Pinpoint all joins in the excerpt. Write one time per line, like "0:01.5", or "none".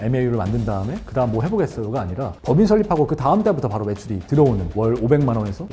0:02.4
0:04.7